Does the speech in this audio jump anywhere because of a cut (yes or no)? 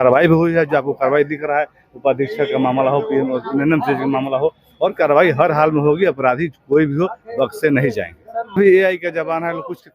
yes